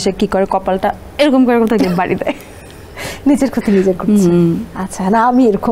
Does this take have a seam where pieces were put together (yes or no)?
no